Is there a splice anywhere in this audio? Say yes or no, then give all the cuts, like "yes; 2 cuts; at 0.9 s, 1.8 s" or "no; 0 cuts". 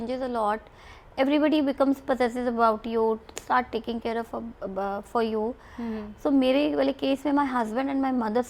no; 0 cuts